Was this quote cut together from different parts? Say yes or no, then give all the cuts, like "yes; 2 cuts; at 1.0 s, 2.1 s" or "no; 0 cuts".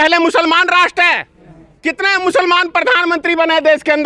no; 0 cuts